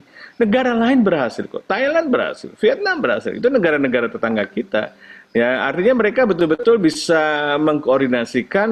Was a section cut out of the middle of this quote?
no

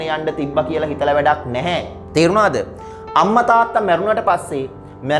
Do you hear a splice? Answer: no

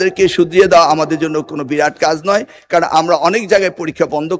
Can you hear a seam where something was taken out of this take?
no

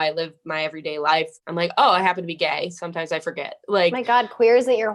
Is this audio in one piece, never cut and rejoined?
no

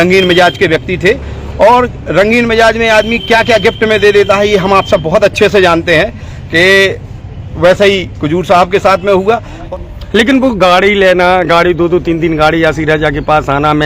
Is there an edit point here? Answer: yes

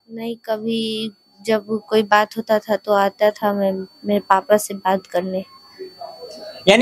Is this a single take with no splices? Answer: yes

